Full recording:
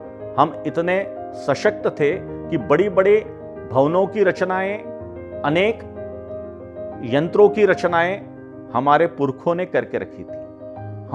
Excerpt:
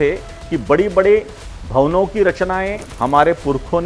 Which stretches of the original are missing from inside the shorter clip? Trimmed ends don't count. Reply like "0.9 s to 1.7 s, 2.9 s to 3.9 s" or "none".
4.8 s to 8.6 s